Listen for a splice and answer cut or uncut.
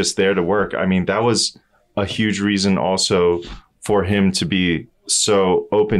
uncut